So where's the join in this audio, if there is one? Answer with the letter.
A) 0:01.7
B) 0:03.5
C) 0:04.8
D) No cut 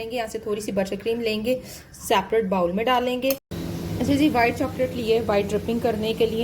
B